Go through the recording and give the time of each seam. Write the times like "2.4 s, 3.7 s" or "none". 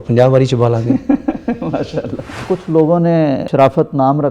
2.4 s, 3.4 s

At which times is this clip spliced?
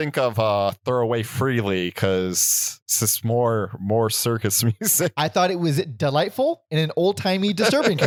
none

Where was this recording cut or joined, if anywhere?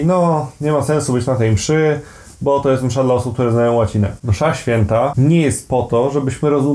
4.2 s, 5.1 s

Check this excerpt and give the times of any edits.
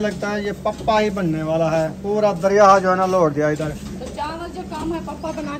none

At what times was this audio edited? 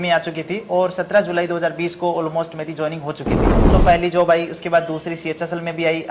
3.6 s

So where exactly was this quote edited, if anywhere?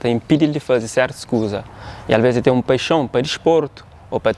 none

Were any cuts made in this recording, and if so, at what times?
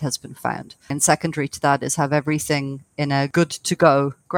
0.9 s, 3.3 s

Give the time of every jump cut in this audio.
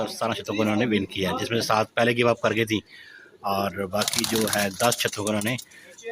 none

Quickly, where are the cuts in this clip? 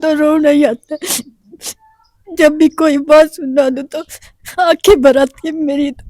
none

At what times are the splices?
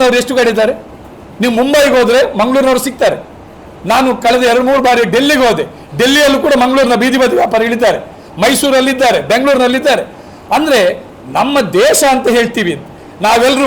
none

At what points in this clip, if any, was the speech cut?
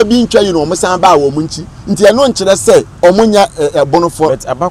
2.9 s

